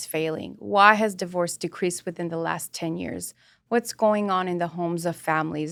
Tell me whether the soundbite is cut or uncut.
uncut